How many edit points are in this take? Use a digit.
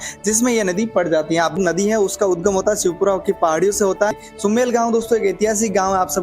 2